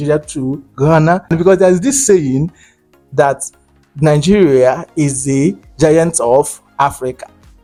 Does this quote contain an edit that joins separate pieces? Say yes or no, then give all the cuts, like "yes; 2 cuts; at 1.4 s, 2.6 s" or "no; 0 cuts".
no; 0 cuts